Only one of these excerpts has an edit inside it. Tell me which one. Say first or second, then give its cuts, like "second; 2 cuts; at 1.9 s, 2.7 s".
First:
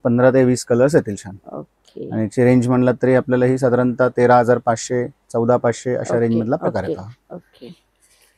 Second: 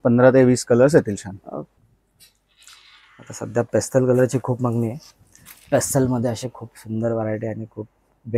second; 1 cut; at 1.8 s